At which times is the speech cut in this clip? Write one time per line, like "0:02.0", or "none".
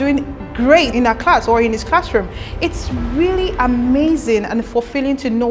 0:00.9